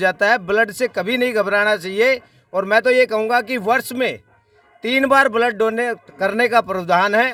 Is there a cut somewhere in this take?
no; 0 cuts

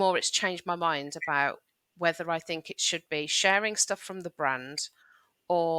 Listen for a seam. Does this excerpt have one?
no; 0 cuts

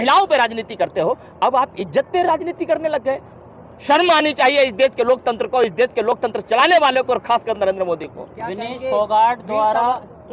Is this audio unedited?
yes; 0 cuts

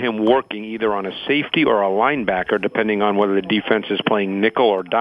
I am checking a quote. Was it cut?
no; 0 cuts

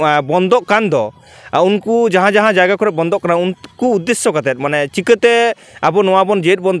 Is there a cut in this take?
no; 0 cuts

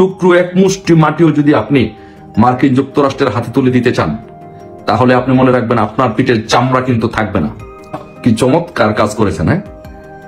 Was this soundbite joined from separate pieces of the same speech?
yes; 1 cut; at 8.1 s

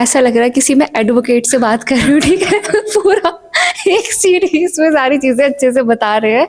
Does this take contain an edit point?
no; 0 cuts

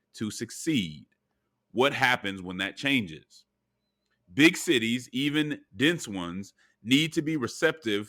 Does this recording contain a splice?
no; 0 cuts

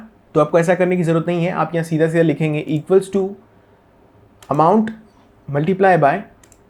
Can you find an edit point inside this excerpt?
no; 0 cuts

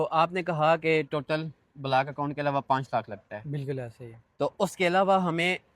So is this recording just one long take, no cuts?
yes; 0 cuts

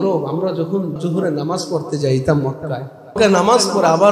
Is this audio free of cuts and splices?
no; 2 cuts; at 1.0 s, 3.1 s

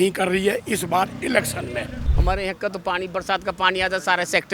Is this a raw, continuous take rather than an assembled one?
no; 1 cut; at 1.9 s

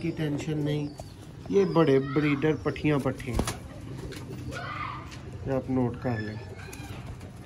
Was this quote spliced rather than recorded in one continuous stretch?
no; 0 cuts

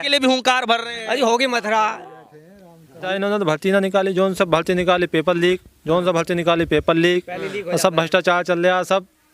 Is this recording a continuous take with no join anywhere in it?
no; 1 cut; at 3.1 s

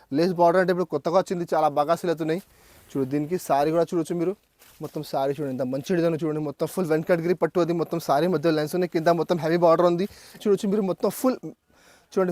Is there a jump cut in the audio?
yes; 1 cut; at 10.4 s

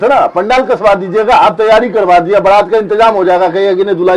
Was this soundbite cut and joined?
no; 0 cuts

